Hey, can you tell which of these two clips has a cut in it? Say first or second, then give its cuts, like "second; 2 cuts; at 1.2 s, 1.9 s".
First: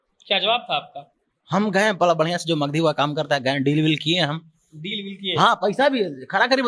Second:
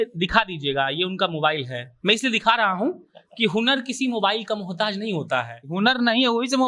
second; 1 cut; at 5.6 s